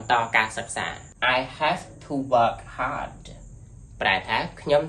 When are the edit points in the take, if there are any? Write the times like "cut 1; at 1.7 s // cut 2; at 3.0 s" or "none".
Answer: cut 1; at 1.0 s